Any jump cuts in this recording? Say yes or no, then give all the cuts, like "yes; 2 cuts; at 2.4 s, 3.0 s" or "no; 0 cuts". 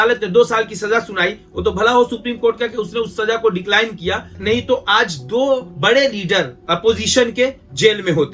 no; 0 cuts